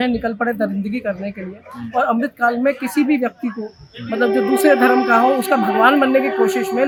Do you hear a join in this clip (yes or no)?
no